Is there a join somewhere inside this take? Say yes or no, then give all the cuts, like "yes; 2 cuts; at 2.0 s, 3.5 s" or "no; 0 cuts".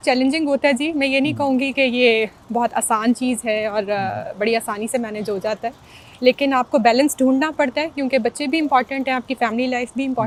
no; 0 cuts